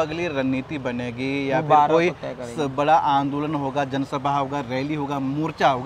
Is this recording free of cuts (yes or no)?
yes